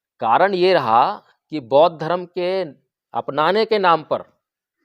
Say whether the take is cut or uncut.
uncut